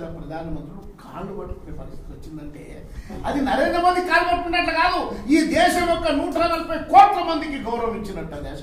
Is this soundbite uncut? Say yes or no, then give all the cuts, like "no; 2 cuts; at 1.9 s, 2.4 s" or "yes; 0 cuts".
yes; 0 cuts